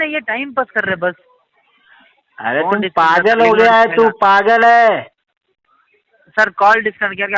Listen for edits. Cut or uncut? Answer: uncut